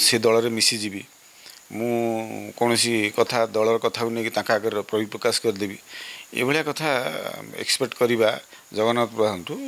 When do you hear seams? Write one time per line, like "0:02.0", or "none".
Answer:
none